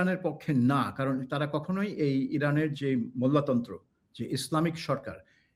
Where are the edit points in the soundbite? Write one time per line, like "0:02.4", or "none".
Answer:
none